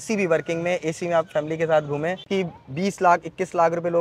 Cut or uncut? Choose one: cut